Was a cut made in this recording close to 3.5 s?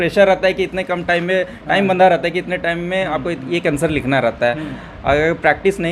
no; 0 cuts

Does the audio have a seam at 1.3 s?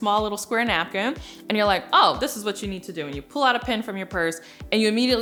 no; 0 cuts

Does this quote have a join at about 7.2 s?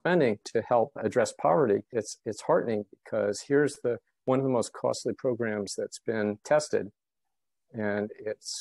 no; 0 cuts

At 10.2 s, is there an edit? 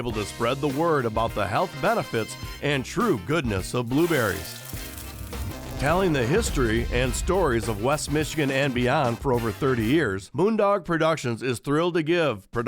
yes; 1 cut; at 10.2 s

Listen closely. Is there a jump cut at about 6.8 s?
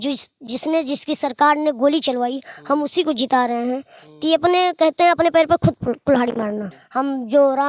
yes; 1 cut; at 6.8 s

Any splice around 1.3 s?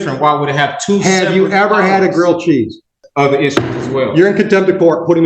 no; 1 cut; at 3.0 s

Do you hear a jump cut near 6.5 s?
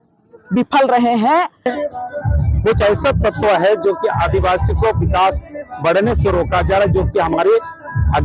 no; 1 cut; at 1.7 s

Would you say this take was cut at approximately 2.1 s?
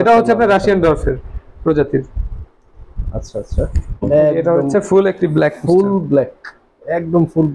no; 1 cut; at 3.8 s

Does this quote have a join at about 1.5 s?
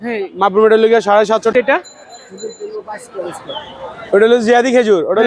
yes; 1 cut; at 1.5 s

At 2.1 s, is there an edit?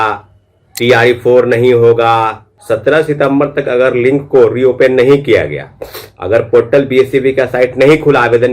yes; 1 cut; at 2.1 s

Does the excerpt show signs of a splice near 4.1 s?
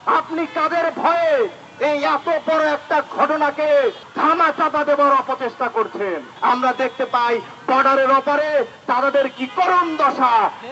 yes; 2 cuts; at 4.1 s, 6.3 s

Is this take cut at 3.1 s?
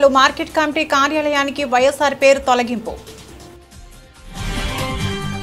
yes; 1 cut; at 3.1 s

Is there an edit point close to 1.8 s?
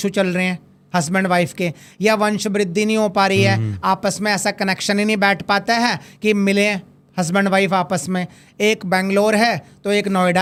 no; 0 cuts

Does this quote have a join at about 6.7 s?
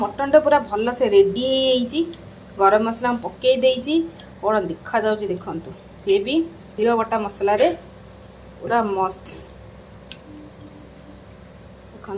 yes; 1 cut; at 6.7 s

